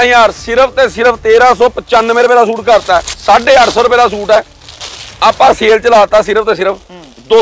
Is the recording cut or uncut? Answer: uncut